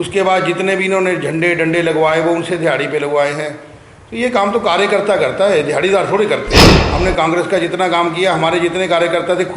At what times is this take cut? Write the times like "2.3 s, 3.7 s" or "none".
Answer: 6.8 s